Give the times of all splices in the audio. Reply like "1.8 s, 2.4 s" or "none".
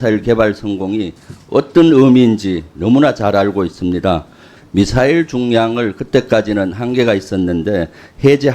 4.5 s